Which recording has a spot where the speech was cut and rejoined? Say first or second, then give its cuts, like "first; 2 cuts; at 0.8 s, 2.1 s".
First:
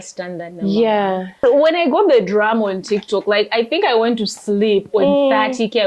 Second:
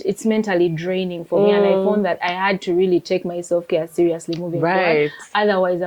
first; 1 cut; at 1.4 s